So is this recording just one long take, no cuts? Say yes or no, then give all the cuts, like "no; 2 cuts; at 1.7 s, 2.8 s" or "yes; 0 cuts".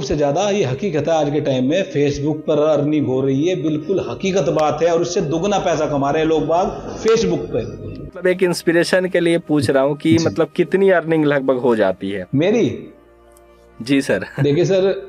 no; 1 cut; at 8.2 s